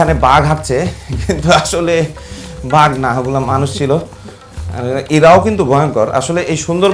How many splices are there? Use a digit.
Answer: 0